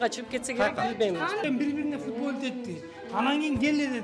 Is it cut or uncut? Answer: cut